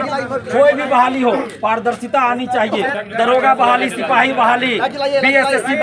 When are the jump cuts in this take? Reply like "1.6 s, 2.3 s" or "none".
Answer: 3.0 s